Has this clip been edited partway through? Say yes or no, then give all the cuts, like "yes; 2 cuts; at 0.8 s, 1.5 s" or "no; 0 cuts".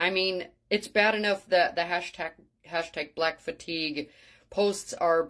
no; 0 cuts